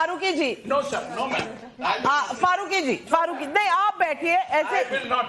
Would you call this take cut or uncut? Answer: uncut